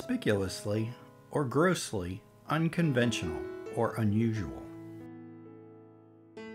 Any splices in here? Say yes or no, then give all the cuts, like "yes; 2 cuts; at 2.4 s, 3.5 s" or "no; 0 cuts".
yes; 1 cut; at 4.7 s